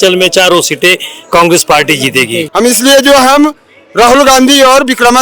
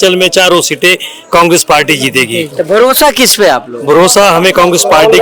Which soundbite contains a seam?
first; 1 cut; at 2.4 s

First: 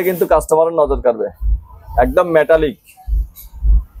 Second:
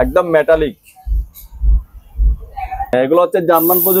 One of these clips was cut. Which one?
second; 1 cut; at 2.9 s

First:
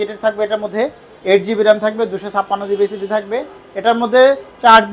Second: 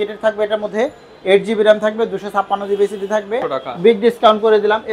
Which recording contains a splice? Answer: second; 1 cut; at 3.6 s

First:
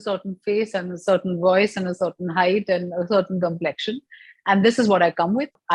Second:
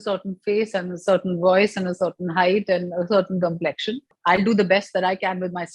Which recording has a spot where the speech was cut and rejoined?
second; 1 cut; at 4.1 s

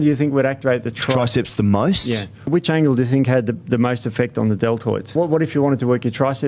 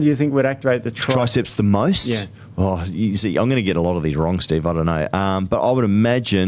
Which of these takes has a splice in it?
first; 2 cuts; at 2.5 s, 5.1 s

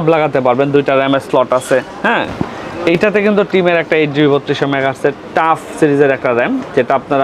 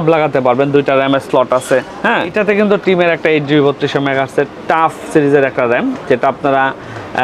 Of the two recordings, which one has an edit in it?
second; 1 cut; at 2.3 s

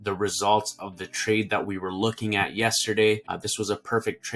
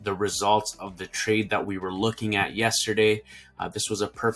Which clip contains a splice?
first; 1 cut; at 3.4 s

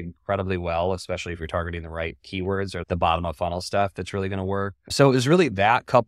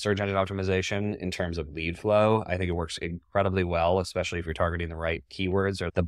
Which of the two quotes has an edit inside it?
first; 1 cut; at 4.8 s

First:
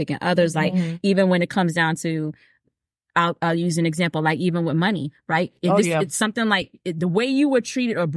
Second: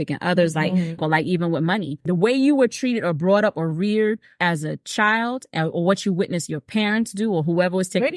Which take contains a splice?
second; 3 cuts; at 1.0 s, 2.0 s, 4.3 s

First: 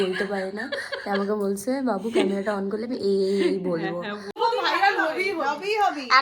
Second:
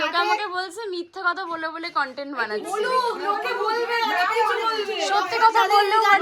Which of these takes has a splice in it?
first; 1 cut; at 4.3 s

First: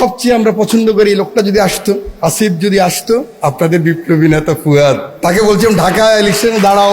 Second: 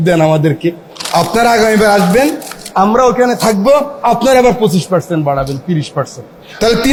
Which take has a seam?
first; 3 cuts; at 2.1 s, 3.3 s, 5.1 s

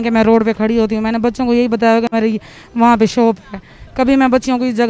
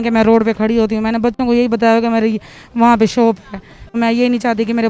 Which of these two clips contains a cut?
second; 1 cut; at 3.9 s

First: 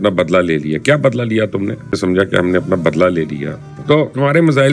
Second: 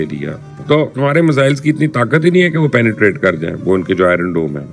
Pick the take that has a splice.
first; 1 cut; at 2.0 s

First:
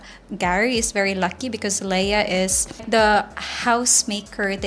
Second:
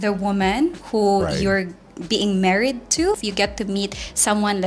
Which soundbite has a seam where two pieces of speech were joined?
first; 1 cut; at 2.8 s

